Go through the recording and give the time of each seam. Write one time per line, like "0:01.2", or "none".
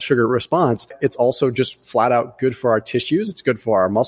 0:00.9